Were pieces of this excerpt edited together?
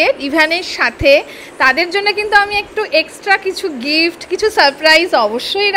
no; 0 cuts

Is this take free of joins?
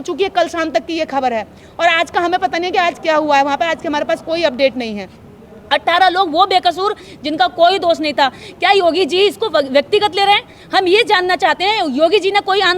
yes; 0 cuts

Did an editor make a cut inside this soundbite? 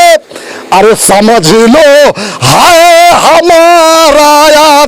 no; 0 cuts

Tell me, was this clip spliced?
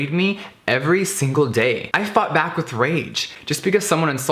yes; 2 cuts; at 1.9 s, 3.3 s

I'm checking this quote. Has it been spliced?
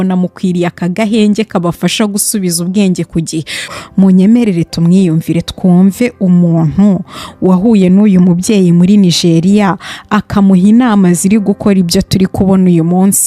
yes; 1 cut; at 3.7 s

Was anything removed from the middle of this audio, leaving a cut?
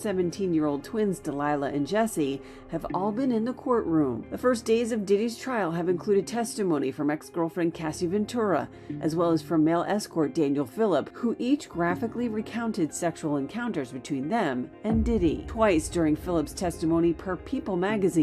no; 0 cuts

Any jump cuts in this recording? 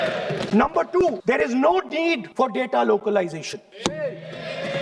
yes; 3 cuts; at 1.2 s, 2.3 s, 3.6 s

